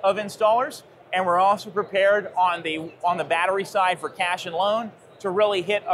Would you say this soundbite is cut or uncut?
uncut